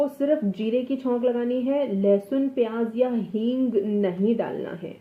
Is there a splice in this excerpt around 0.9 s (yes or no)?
no